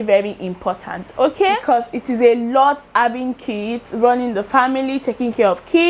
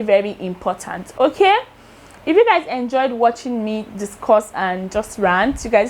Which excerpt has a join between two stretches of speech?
first; 1 cut; at 1.6 s

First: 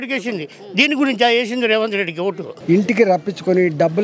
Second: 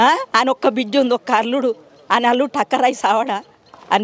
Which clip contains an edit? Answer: first; 1 cut; at 2.5 s

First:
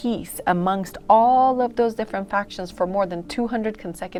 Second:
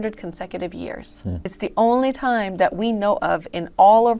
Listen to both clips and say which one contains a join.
second; 1 cut; at 1.5 s

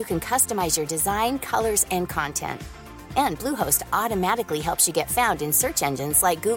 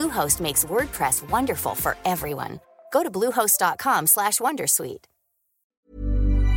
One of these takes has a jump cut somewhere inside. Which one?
second; 1 cut; at 5.5 s

